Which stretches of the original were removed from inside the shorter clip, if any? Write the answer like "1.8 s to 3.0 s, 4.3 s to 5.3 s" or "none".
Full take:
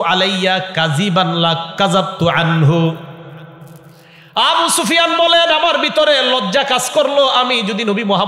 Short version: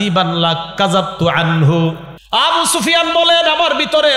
3.1 s to 4.2 s